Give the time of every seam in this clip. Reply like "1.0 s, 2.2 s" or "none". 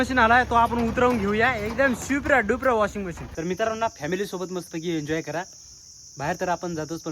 3.2 s